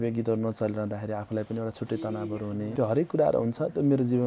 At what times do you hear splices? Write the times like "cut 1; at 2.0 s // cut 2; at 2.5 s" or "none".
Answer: cut 1; at 2.7 s